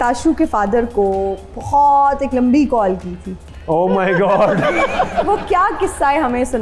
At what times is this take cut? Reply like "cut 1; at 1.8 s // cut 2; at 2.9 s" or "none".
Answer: cut 1; at 5.3 s